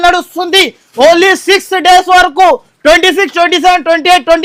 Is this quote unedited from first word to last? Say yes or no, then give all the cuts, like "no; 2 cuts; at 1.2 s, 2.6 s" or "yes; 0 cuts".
yes; 0 cuts